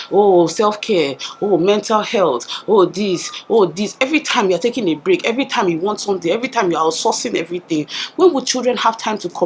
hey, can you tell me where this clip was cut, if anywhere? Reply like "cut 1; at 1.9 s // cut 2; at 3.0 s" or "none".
none